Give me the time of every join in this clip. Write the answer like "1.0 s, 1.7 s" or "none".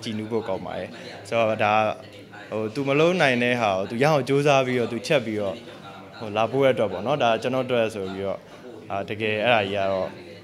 none